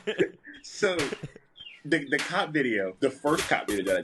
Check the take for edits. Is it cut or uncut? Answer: cut